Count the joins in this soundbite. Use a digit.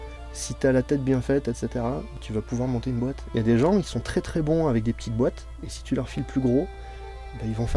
2